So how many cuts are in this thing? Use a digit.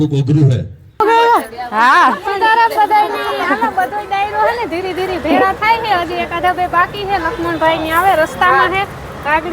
1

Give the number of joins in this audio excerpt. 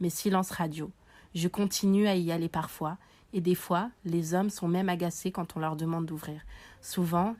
0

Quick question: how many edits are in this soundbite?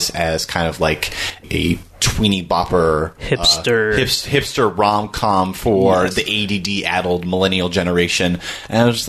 1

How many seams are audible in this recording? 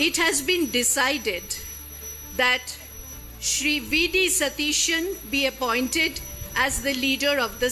0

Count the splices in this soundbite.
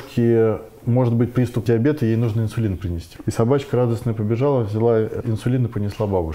3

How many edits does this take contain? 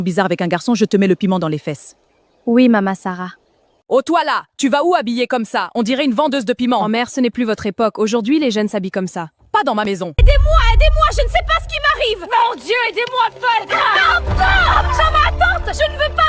2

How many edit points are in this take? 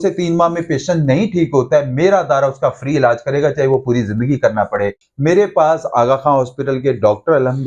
1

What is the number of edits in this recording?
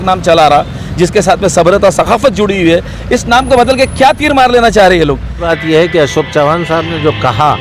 1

